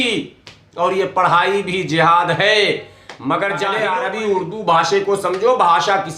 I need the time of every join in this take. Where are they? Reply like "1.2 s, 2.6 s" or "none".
3.7 s